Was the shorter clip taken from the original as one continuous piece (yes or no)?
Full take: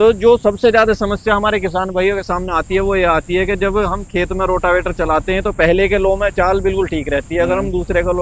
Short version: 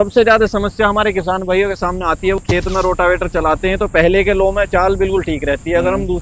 no